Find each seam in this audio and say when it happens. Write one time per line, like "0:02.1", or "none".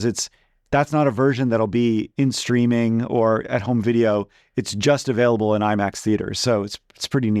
none

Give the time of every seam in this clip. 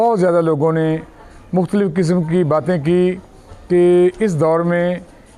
none

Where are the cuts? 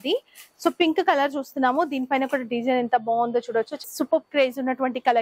0:03.8

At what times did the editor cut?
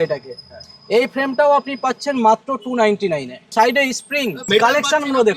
0:03.5
0:04.5

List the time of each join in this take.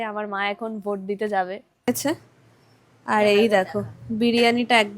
0:01.9

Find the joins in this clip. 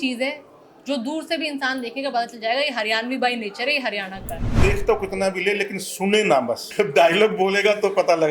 0:04.6
0:06.7

